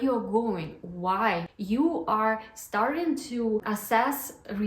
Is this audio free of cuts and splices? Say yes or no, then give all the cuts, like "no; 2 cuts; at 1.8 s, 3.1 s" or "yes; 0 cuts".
no; 2 cuts; at 1.5 s, 3.6 s